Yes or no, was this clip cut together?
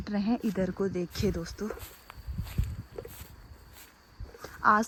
no